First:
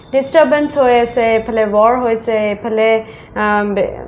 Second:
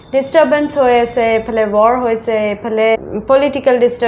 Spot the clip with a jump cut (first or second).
second